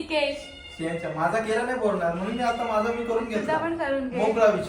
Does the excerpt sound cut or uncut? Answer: uncut